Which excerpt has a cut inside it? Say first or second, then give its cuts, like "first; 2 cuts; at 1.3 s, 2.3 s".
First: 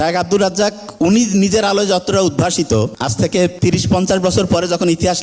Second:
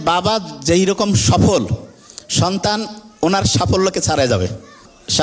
first; 1 cut; at 3.3 s